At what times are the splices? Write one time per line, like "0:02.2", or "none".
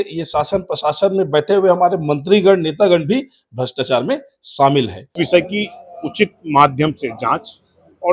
0:05.1